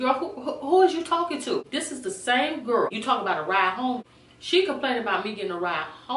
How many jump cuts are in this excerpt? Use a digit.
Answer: 3